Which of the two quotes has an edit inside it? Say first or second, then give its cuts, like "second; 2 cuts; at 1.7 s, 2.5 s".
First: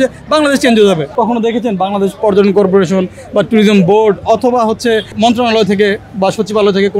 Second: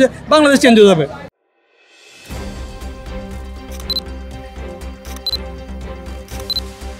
first; 2 cuts; at 1.1 s, 5.1 s